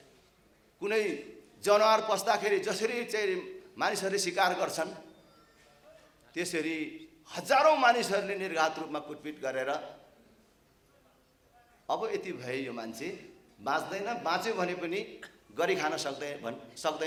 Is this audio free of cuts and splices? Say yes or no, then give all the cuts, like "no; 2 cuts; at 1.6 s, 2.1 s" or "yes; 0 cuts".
yes; 0 cuts